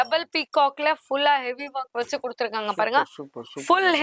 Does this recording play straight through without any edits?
yes; 0 cuts

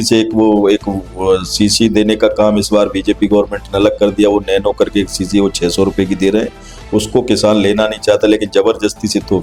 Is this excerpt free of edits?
yes; 0 cuts

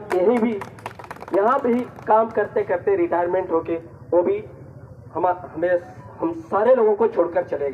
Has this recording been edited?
no; 0 cuts

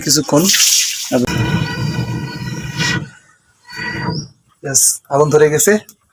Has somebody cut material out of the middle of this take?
yes; 1 cut; at 1.3 s

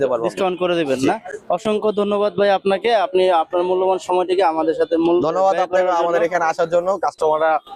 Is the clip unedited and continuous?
yes; 0 cuts

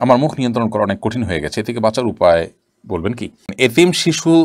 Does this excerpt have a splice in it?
yes; 1 cut; at 3.5 s

